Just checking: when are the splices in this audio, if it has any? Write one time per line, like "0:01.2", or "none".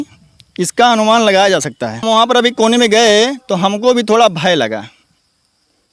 0:02.0